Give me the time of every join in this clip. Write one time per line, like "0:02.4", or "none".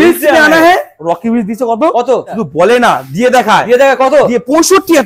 0:01.0
0:02.4

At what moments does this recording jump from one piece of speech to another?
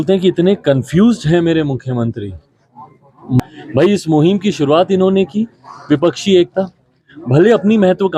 0:03.4

